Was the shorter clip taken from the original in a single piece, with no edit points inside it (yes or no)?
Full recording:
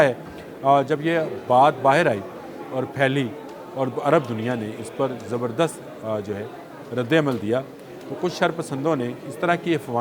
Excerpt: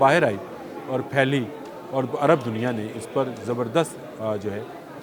yes